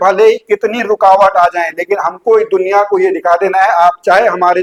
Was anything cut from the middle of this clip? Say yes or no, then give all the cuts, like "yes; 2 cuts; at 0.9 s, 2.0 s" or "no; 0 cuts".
no; 0 cuts